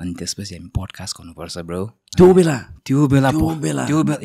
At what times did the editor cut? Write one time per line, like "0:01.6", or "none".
none